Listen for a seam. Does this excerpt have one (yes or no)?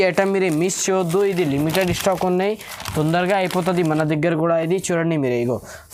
no